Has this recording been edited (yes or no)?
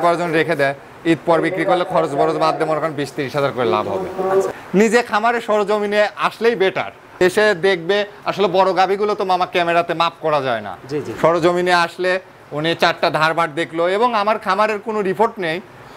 yes